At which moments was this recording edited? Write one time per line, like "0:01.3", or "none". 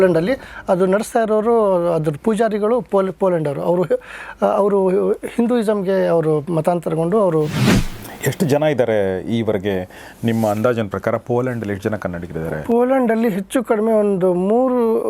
0:08.0